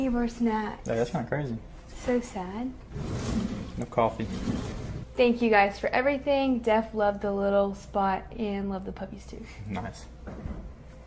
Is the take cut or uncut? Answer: cut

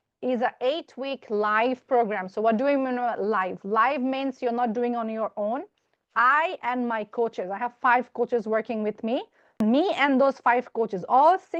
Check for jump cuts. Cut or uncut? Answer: uncut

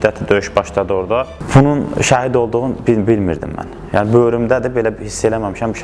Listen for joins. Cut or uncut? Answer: cut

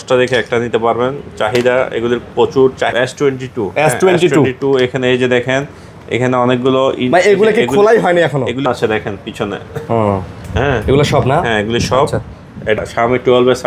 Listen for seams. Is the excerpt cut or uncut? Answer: cut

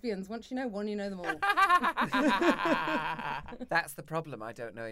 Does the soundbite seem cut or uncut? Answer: cut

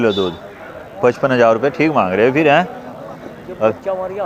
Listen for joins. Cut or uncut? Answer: uncut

